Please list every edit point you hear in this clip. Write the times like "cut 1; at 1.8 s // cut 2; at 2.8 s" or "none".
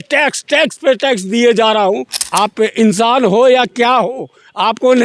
cut 1; at 2.2 s